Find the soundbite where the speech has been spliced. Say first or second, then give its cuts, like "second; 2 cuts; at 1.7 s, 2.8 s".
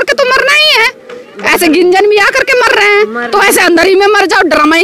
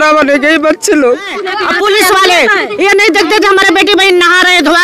second; 1 cut; at 1.6 s